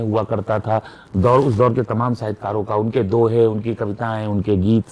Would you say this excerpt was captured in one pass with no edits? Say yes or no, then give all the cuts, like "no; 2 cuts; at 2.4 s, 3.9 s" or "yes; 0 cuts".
yes; 0 cuts